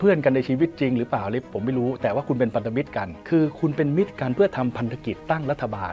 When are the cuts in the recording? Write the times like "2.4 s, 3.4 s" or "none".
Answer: 3.1 s